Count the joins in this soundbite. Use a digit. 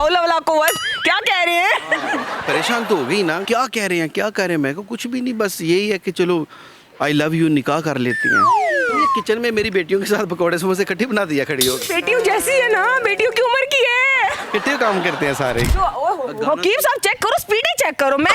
2